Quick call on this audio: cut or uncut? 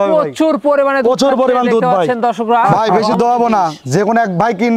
cut